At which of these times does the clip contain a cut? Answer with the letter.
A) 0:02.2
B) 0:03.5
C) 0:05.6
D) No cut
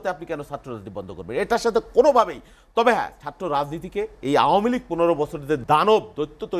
C